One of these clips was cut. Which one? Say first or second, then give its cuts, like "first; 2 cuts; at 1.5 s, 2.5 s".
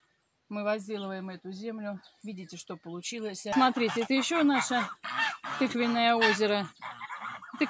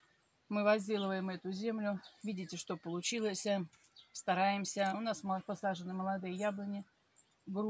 first; 1 cut; at 3.5 s